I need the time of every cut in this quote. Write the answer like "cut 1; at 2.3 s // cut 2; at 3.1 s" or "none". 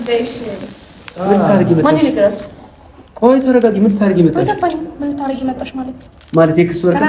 none